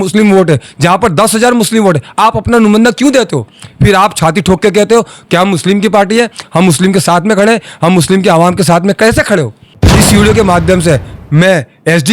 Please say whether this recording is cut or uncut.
cut